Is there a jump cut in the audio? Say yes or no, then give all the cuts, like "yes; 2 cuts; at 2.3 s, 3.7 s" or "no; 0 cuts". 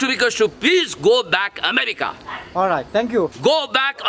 yes; 1 cut; at 2.9 s